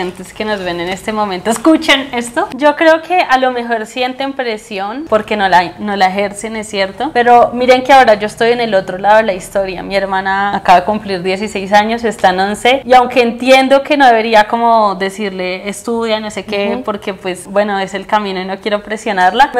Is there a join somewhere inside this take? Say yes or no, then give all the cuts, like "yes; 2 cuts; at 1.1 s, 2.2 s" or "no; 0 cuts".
no; 0 cuts